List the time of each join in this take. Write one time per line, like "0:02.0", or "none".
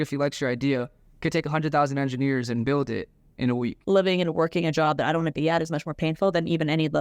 0:02.6
0:03.8